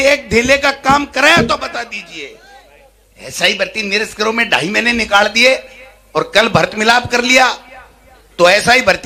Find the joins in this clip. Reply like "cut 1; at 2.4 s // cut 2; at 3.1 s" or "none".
none